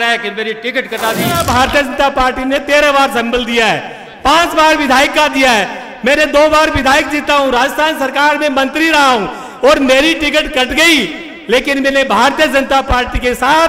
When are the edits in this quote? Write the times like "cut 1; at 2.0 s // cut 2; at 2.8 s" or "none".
cut 1; at 1.4 s